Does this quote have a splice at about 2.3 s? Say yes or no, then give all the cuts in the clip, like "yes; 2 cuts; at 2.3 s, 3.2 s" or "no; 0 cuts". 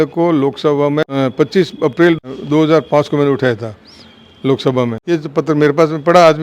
yes; 3 cuts; at 1.1 s, 2.3 s, 5.0 s